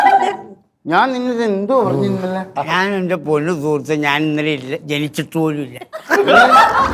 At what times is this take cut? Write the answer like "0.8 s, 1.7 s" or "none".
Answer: none